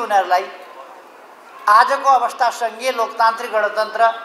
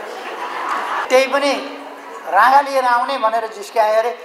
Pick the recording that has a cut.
second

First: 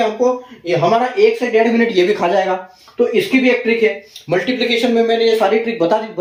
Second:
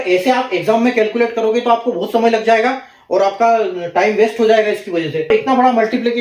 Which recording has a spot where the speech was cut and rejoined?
second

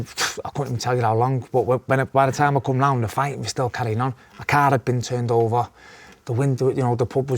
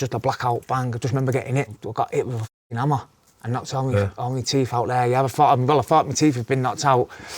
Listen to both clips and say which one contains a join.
second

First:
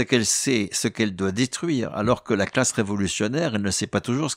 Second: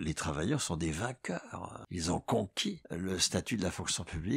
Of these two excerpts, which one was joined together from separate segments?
second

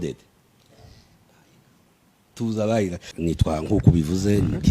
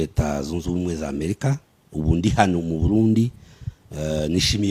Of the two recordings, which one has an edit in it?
first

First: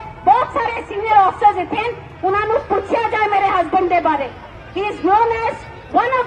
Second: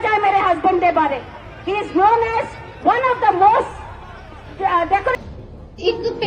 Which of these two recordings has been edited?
second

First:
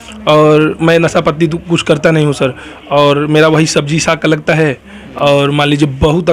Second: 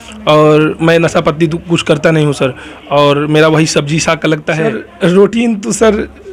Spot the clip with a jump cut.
second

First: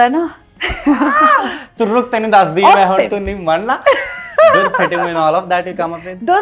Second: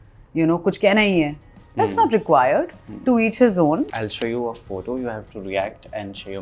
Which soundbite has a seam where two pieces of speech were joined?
second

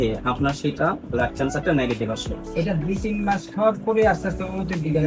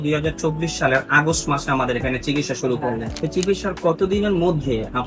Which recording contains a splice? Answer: second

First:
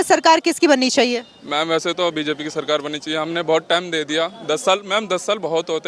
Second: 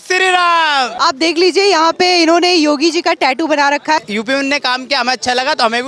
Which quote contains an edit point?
second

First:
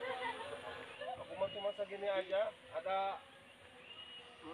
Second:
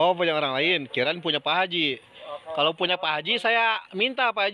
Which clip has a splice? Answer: first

